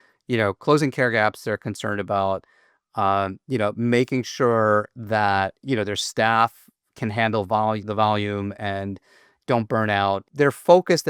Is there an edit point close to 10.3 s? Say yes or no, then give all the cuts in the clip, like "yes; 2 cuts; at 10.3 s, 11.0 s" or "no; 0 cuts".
yes; 2 cuts; at 5.6 s, 10.3 s